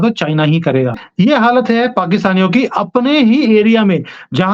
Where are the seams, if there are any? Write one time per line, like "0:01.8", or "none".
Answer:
0:01.0